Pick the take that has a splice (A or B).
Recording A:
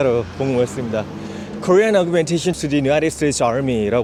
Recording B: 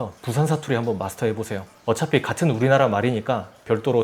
B